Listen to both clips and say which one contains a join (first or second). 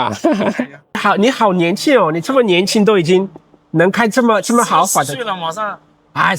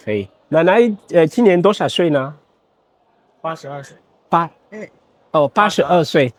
first